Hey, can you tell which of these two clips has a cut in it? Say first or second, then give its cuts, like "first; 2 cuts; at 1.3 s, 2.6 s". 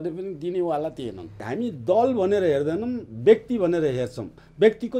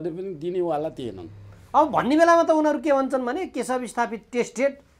first; 1 cut; at 1.4 s